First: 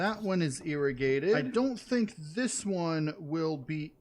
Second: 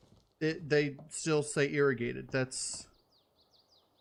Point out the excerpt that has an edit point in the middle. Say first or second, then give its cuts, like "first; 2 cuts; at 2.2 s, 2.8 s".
first; 1 cut; at 1.5 s